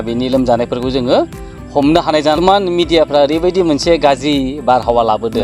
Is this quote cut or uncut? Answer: cut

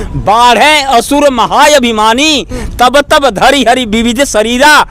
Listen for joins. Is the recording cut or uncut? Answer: uncut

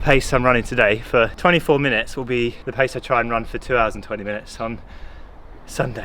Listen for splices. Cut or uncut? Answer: cut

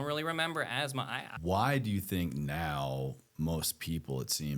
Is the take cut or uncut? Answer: cut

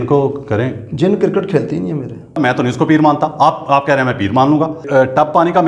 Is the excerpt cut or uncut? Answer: cut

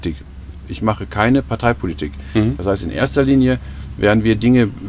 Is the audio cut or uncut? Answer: uncut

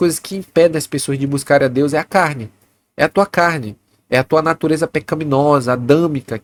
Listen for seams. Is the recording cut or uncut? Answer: uncut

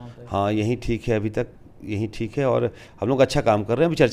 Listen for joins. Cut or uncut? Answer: uncut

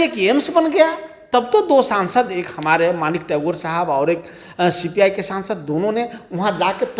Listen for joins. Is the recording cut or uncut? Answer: uncut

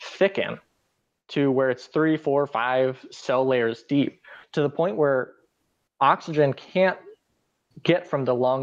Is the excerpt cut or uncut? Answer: uncut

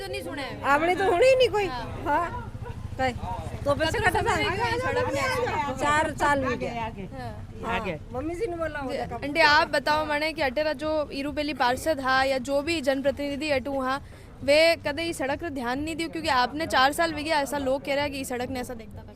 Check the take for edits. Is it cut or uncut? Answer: uncut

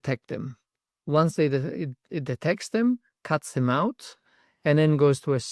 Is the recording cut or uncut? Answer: uncut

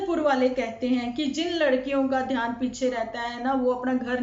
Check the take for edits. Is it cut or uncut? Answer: uncut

